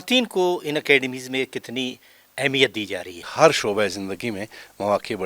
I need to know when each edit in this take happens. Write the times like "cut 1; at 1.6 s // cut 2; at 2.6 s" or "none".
cut 1; at 3.3 s

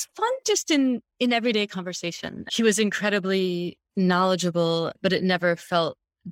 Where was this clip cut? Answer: cut 1; at 2.5 s // cut 2; at 3.8 s

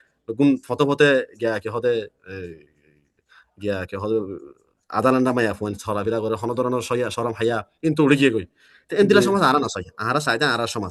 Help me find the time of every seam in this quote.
none

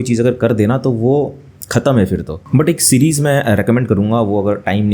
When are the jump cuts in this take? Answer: cut 1; at 2.4 s

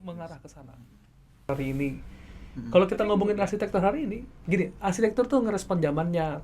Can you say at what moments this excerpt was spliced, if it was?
cut 1; at 1.5 s

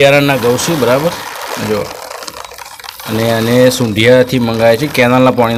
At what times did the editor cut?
none

